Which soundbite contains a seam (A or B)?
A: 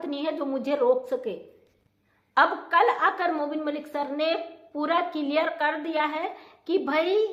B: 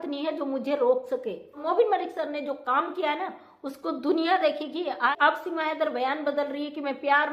B